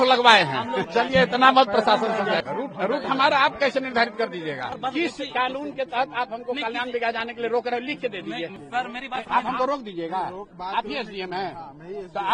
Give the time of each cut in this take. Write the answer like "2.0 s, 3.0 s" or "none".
0.8 s, 2.4 s, 4.7 s, 8.6 s